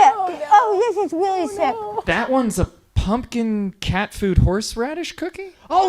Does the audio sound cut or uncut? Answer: cut